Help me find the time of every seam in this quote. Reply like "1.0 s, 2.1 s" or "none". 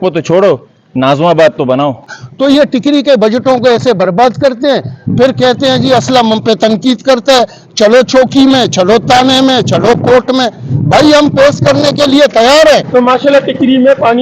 2.2 s, 12.9 s